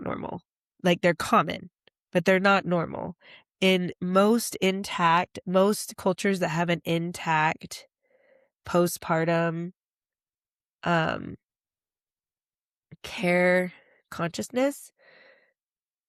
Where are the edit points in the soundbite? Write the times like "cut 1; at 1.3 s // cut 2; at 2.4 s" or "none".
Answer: none